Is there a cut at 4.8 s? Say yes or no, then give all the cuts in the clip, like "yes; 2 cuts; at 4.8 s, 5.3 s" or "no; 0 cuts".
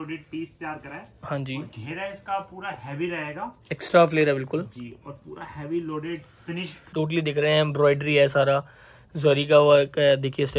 no; 1 cut; at 6.8 s